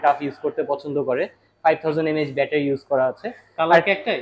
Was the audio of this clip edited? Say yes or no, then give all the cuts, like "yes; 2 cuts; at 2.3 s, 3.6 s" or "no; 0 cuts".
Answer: no; 0 cuts